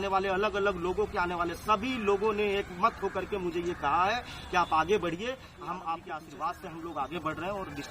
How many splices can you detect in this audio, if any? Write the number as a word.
one